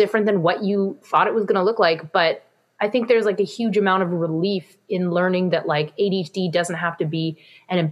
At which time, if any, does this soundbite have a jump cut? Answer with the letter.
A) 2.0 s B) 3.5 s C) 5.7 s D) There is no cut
D